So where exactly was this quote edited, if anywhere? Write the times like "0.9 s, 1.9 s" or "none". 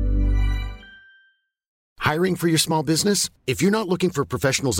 1.8 s